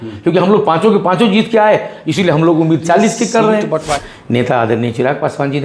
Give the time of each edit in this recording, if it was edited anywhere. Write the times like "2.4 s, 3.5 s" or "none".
4.1 s